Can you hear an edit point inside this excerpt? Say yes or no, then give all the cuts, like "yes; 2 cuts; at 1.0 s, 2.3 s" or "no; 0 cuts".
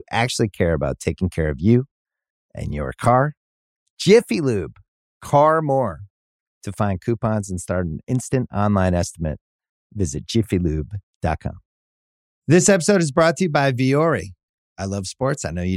yes; 1 cut; at 11.7 s